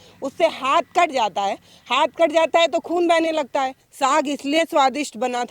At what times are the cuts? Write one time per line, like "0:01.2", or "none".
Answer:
0:03.8